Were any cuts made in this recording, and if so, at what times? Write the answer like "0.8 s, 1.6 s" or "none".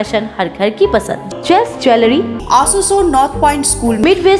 2.4 s